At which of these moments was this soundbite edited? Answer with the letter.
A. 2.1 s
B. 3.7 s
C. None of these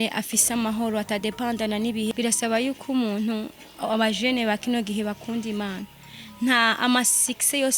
A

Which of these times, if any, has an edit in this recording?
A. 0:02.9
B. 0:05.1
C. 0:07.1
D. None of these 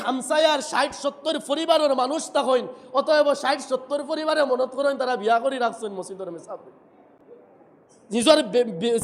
D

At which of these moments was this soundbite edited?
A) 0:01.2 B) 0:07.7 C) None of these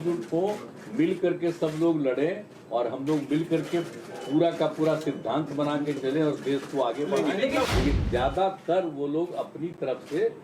B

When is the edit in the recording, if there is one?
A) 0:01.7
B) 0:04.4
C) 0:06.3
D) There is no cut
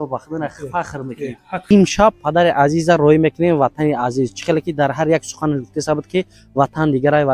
A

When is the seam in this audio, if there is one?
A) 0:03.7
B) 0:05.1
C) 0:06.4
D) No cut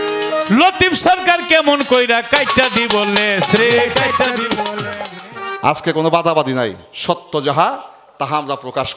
B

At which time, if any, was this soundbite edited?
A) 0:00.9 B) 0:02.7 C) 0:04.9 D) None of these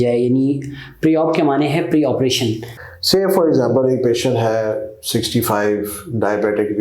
B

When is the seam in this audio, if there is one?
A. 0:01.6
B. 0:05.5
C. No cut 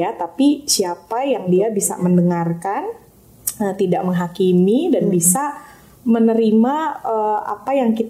C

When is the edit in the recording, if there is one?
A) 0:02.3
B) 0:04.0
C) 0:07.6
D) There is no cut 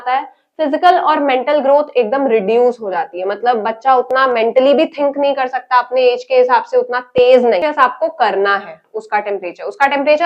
C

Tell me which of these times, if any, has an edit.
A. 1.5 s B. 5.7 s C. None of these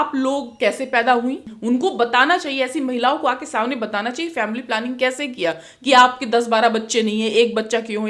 A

